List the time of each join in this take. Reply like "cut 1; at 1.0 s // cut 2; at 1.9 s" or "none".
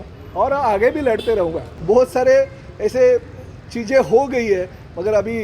cut 1; at 1.7 s